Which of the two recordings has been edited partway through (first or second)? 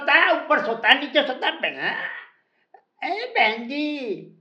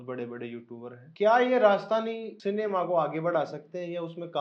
second